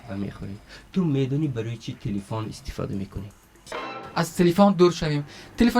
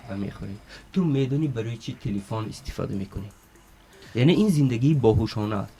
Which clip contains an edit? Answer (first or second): first